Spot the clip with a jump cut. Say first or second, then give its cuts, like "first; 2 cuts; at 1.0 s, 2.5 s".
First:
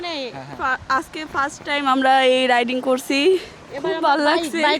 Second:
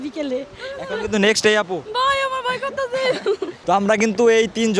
second; 2 cuts; at 1.9 s, 3.6 s